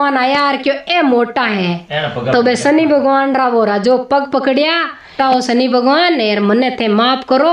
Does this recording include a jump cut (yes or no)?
yes